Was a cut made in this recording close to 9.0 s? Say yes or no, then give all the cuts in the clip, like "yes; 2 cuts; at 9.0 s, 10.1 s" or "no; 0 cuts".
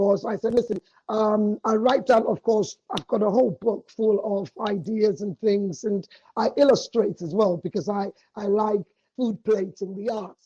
yes; 1 cut; at 9.0 s